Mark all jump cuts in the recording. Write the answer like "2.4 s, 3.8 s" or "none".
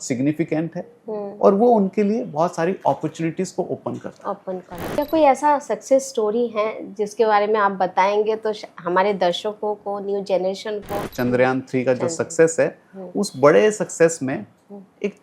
4.9 s, 11.0 s